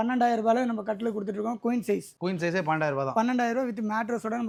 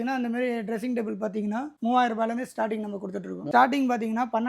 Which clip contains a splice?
second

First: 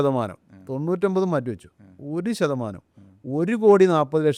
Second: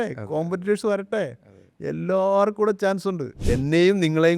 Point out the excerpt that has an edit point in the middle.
second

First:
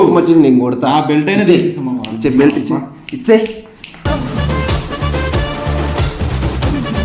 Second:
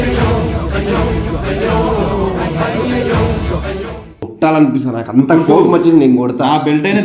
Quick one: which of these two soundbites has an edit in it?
second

